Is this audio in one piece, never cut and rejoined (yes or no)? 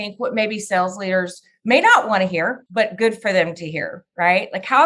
no